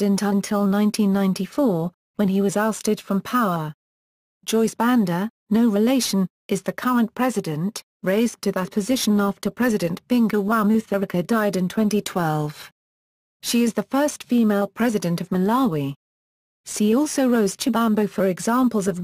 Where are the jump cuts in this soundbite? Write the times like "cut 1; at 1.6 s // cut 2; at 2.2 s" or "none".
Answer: none